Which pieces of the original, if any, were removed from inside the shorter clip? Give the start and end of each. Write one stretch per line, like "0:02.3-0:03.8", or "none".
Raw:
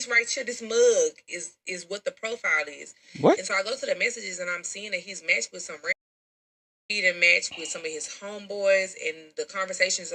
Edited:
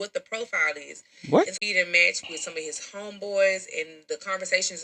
0:03.5-0:06.8